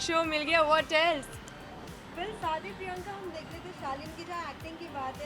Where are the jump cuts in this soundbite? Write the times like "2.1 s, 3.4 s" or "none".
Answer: none

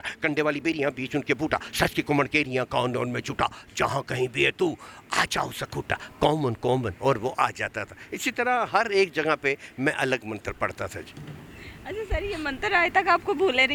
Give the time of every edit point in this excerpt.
none

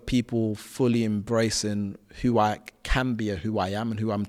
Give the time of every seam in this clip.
none

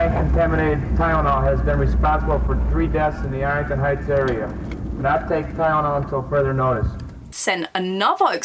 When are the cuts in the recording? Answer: 7.3 s

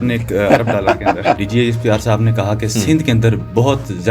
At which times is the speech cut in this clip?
1.4 s

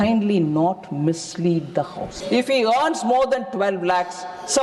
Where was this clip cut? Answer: 2.1 s

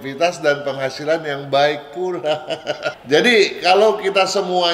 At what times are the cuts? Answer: 2.9 s

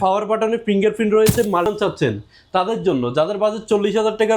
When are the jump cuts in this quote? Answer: 1.7 s

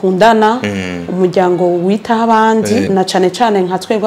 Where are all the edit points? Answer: 2.9 s

